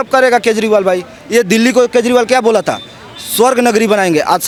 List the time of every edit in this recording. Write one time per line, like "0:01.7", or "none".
none